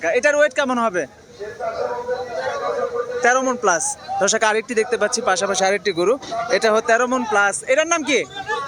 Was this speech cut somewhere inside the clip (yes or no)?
no